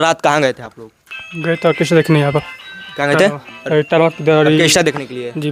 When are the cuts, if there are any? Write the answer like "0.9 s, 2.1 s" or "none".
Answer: none